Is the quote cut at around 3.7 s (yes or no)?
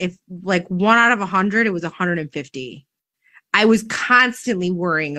no